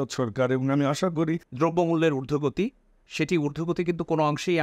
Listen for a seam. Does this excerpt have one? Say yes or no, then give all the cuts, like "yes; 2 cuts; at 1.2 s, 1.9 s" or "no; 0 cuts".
yes; 1 cut; at 1.5 s